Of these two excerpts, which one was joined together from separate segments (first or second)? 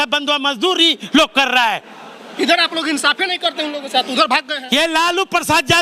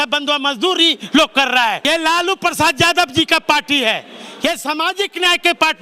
second